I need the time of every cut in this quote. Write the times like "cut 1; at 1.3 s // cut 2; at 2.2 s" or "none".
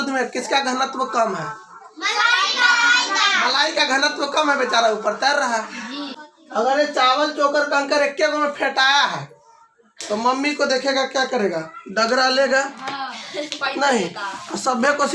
cut 1; at 6.1 s